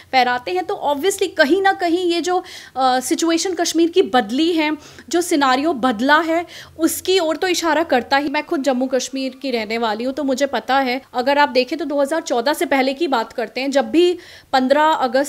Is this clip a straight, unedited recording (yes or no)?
no